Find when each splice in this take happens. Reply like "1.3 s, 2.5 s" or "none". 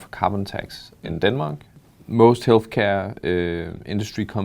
1.7 s